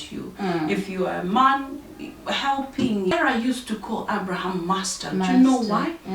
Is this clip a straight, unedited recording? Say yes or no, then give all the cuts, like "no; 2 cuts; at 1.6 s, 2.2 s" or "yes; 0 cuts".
no; 1 cut; at 3.1 s